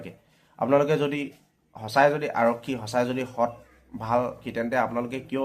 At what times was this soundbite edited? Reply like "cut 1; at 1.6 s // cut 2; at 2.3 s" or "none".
cut 1; at 4.5 s